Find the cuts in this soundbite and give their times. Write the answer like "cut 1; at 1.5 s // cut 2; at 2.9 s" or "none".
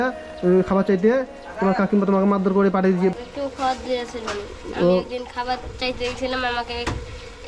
cut 1; at 3.2 s